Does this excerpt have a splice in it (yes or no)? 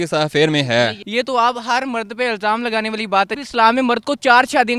yes